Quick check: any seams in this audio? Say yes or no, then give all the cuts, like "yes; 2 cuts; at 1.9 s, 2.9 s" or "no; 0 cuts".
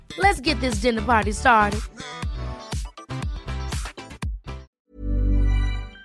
yes; 1 cut; at 4.7 s